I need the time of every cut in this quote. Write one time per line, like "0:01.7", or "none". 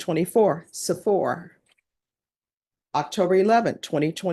none